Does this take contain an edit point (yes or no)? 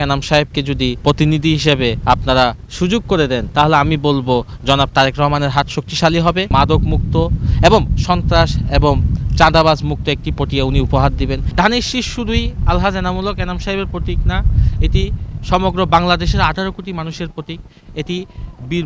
yes